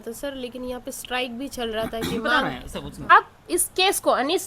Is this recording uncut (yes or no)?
no